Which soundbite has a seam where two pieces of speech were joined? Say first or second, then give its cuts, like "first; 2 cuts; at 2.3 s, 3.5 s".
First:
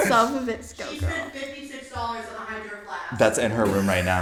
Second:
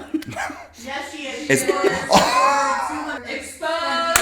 second; 1 cut; at 3.2 s